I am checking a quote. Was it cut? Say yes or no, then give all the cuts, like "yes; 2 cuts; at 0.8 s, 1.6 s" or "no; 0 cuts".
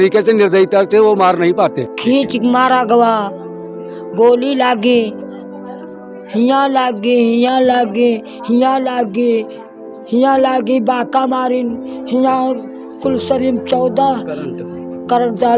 yes; 1 cut; at 1.9 s